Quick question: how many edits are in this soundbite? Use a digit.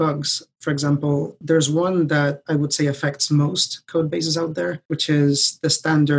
3